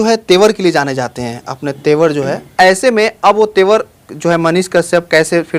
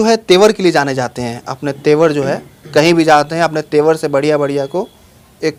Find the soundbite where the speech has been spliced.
first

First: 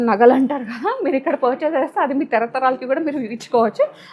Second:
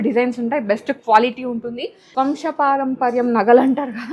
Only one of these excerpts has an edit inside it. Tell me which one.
second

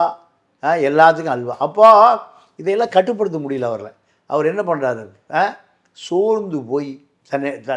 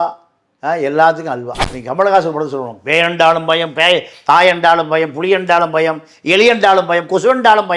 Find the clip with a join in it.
second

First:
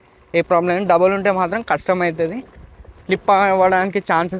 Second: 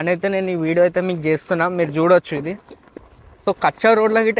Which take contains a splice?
second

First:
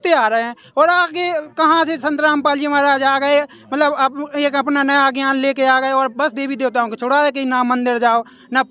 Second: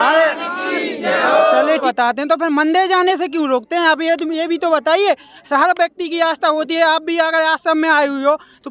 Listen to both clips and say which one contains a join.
second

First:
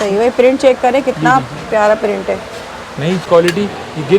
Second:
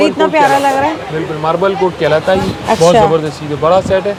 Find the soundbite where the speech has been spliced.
first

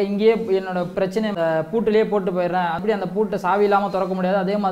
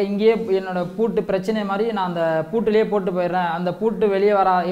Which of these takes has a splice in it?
first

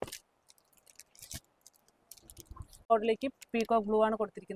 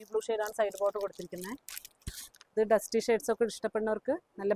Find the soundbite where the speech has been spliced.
first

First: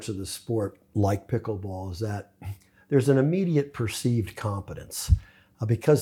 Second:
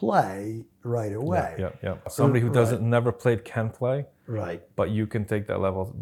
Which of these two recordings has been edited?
second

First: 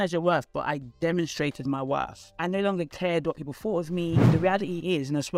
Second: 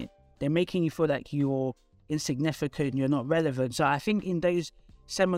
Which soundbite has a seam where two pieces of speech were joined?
first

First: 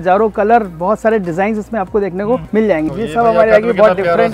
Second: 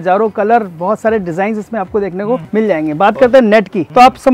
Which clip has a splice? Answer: first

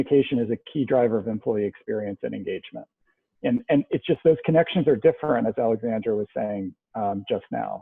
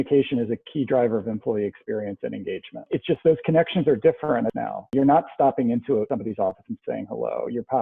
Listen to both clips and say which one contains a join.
second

